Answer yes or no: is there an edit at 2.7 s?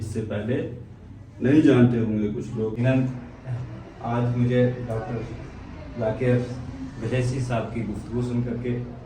yes